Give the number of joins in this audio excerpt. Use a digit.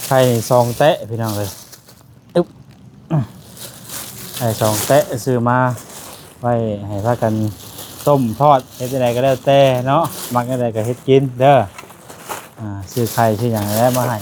0